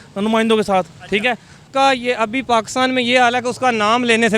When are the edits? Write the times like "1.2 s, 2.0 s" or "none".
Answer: 1.6 s